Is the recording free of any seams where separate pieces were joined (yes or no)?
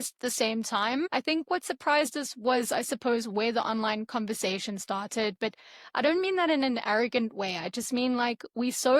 no